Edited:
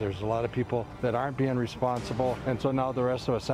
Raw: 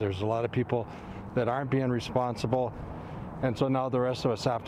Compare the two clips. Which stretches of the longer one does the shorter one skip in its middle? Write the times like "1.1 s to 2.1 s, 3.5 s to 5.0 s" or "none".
0.9 s to 1.2 s, 2.7 s to 3.4 s